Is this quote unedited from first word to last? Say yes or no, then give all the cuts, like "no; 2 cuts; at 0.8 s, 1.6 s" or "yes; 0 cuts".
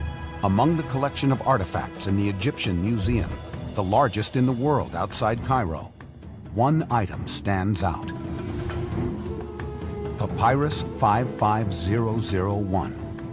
no; 1 cut; at 2.6 s